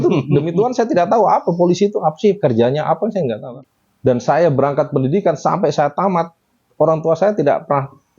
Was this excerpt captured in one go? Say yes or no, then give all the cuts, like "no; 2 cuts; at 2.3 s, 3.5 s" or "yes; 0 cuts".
no; 1 cut; at 3.4 s